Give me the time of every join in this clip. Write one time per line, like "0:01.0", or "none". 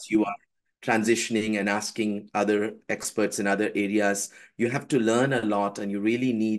none